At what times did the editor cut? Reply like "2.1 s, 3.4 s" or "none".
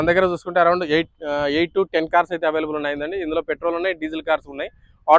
none